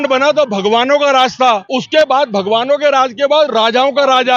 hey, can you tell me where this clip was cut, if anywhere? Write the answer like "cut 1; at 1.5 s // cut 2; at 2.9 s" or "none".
cut 1; at 1.7 s

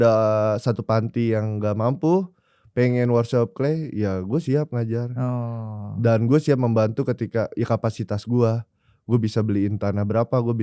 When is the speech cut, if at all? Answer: none

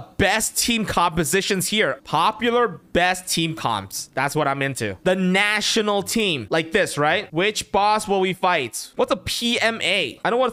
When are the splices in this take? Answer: cut 1; at 2.0 s // cut 2; at 6.4 s // cut 3; at 7.3 s // cut 4; at 8.9 s

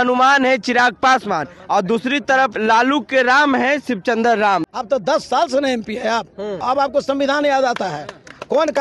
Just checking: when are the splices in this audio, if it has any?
cut 1; at 2.5 s // cut 2; at 4.7 s // cut 3; at 6.6 s

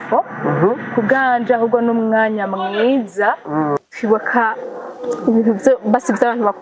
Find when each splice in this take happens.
cut 1; at 3.8 s

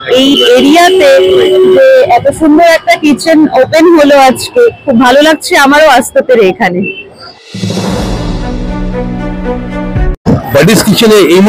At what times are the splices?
none

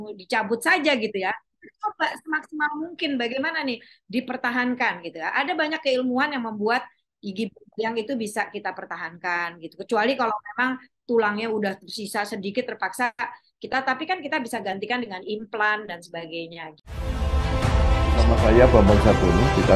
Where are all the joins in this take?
cut 1; at 16.6 s

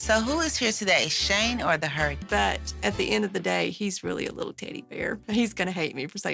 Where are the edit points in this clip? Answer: none

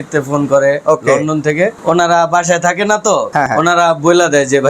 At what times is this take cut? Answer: cut 1; at 1.8 s // cut 2; at 3.5 s

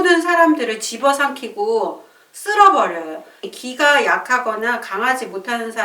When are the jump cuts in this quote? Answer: cut 1; at 3.5 s

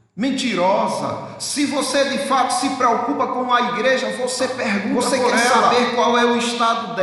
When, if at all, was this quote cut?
cut 1; at 5.7 s

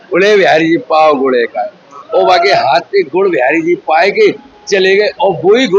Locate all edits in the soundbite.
cut 1; at 2.0 s

